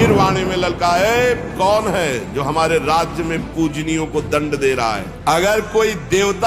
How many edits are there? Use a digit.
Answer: 1